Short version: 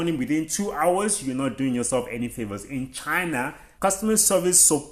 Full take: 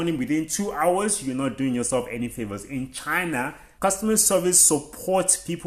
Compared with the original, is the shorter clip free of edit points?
yes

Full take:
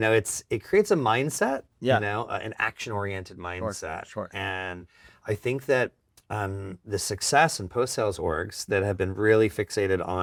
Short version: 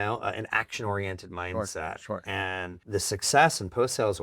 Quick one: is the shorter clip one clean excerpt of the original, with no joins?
no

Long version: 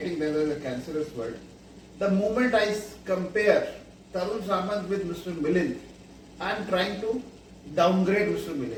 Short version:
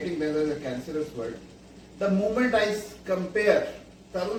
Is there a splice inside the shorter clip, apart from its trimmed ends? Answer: no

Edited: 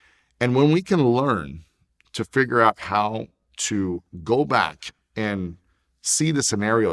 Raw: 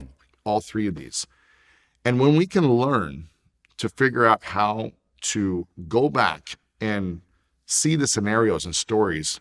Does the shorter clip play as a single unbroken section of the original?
yes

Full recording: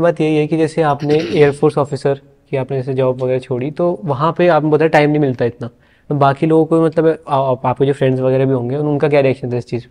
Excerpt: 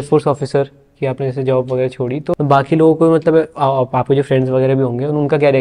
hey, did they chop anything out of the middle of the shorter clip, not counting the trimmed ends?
yes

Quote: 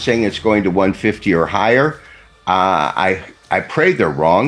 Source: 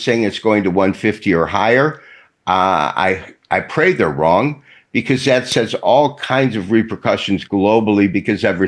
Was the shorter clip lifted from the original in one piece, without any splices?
yes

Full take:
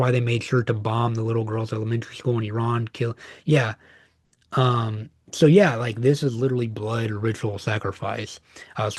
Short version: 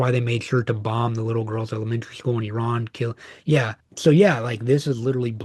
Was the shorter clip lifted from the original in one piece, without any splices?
no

